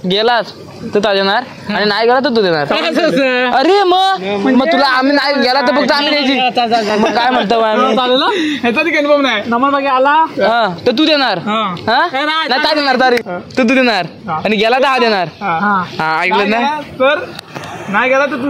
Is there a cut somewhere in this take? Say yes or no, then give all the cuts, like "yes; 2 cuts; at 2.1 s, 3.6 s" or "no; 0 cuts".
no; 0 cuts